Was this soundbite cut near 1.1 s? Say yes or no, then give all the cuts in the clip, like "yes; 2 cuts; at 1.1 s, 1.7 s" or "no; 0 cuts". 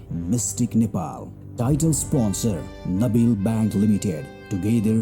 yes; 1 cut; at 1.1 s